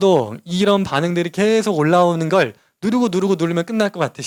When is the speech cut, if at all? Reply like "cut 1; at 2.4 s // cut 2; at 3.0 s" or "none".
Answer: none